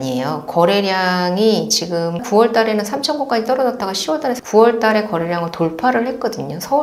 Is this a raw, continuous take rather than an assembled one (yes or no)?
no